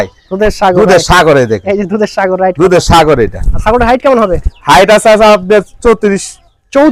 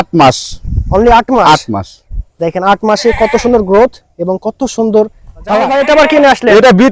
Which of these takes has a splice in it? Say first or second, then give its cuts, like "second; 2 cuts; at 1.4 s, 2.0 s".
second; 1 cut; at 5.6 s